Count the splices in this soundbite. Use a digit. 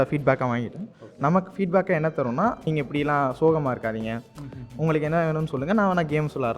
1